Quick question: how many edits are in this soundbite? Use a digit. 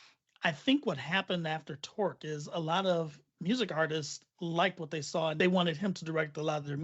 1